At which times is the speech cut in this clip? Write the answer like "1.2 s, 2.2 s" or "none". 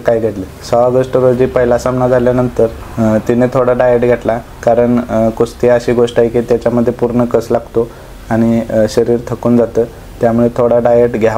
none